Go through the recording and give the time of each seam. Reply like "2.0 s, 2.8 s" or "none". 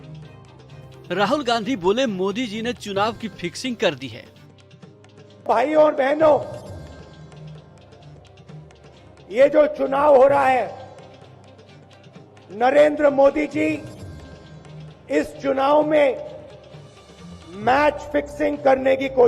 1.1 s, 11.1 s, 12.5 s